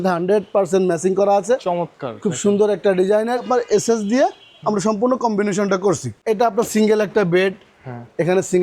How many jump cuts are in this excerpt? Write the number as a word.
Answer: two